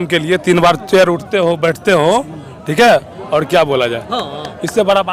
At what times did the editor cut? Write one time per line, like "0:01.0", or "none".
none